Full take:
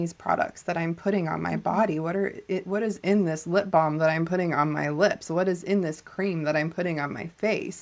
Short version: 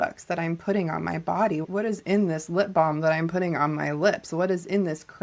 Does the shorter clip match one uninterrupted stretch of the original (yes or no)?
no